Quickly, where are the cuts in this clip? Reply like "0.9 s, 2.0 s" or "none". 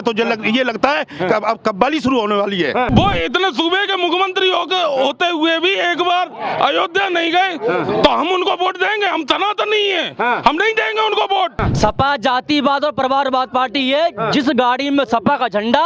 2.9 s, 11.6 s